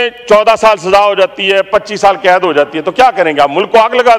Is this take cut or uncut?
uncut